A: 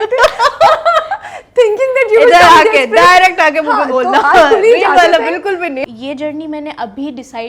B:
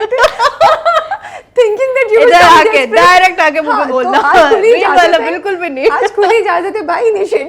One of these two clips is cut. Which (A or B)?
A